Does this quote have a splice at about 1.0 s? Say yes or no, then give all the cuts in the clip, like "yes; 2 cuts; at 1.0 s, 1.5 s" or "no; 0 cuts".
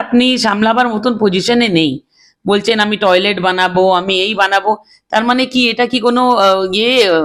no; 0 cuts